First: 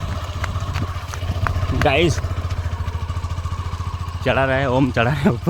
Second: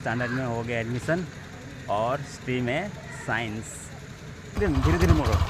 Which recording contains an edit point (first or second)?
second